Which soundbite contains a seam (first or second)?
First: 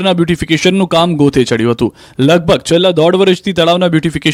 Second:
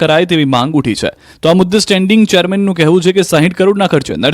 second